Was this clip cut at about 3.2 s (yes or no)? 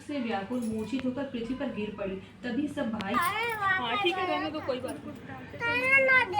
yes